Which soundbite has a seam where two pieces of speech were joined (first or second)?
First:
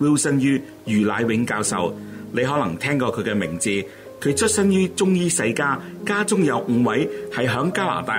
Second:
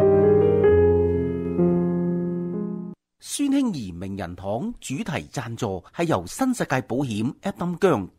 second